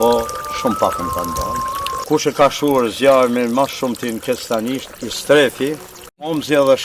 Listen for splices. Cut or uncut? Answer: uncut